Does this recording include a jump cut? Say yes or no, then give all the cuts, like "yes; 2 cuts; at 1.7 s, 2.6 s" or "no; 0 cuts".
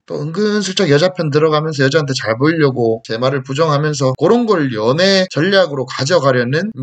no; 0 cuts